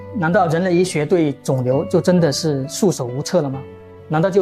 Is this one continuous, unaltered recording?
yes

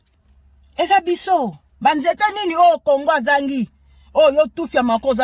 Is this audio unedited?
yes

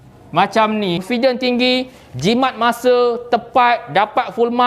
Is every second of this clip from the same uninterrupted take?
no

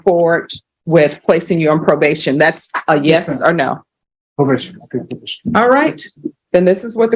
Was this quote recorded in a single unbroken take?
yes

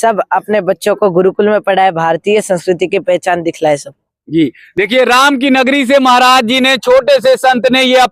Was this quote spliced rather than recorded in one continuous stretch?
no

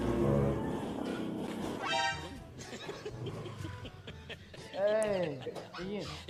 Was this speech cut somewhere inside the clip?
no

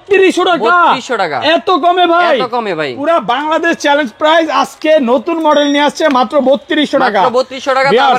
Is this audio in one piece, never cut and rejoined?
yes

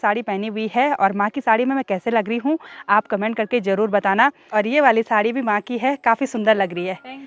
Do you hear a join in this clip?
yes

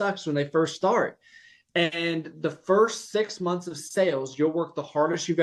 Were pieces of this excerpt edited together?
no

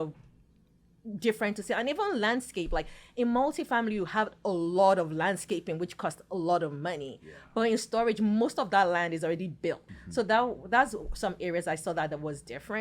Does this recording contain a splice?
yes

